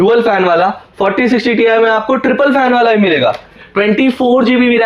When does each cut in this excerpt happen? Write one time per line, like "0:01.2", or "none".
0:03.6